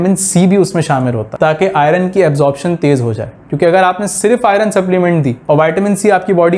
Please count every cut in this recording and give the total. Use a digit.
2